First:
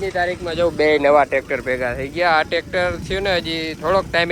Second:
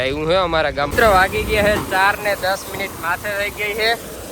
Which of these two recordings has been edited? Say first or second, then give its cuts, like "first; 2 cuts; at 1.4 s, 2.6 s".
second; 1 cut; at 0.9 s